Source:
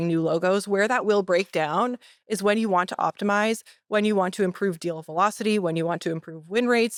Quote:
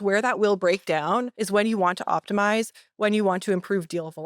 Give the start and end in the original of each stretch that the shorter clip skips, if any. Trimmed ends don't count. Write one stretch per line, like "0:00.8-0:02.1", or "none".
0:02.0-0:02.3